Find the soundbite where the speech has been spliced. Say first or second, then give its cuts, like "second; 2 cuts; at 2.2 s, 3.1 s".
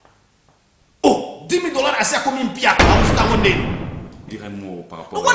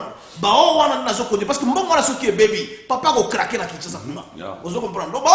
first; 1 cut; at 4.2 s